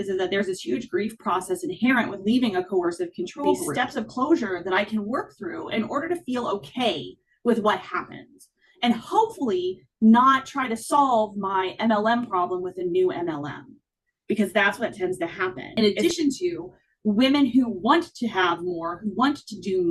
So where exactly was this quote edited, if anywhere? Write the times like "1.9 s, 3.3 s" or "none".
3.6 s, 15.7 s